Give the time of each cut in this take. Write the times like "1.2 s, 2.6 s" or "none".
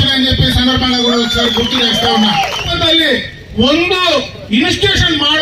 2.7 s